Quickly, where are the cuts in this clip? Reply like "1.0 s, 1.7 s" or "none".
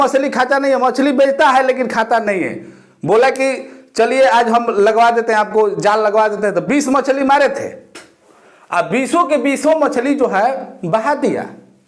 none

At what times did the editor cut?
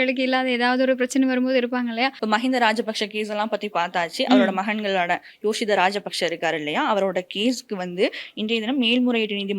none

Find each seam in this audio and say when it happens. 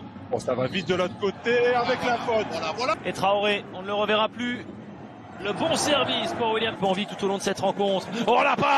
2.9 s, 6.7 s

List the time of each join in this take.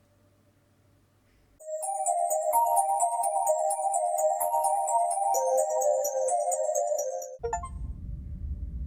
7.8 s

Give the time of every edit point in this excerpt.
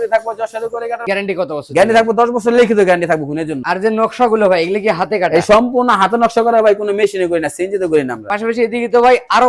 1.0 s, 3.6 s, 8.2 s

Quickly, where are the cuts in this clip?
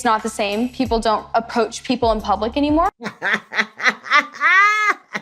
none

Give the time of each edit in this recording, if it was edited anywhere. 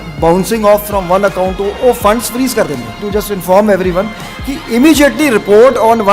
2.9 s

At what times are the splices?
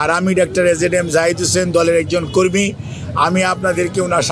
none

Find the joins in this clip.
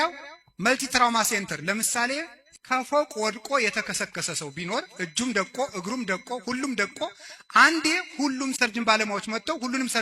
2.4 s, 8.6 s

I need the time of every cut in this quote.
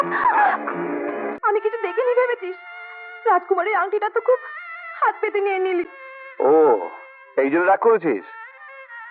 1.3 s

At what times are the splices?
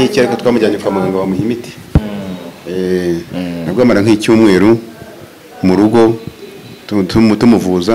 3.4 s

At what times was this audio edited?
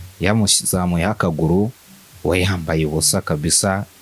none

